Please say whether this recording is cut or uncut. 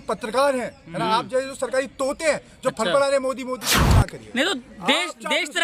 cut